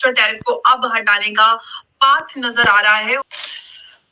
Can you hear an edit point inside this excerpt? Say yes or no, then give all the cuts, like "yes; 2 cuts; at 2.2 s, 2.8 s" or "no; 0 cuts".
yes; 1 cut; at 3.2 s